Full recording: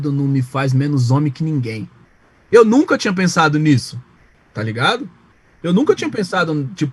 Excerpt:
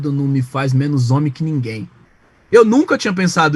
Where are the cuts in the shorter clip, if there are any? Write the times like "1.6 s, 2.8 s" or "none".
none